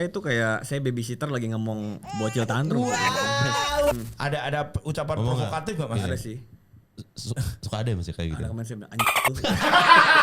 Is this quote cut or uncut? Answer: cut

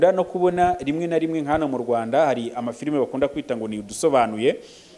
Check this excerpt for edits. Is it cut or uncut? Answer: uncut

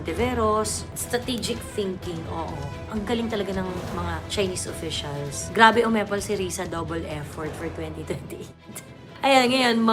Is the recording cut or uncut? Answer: cut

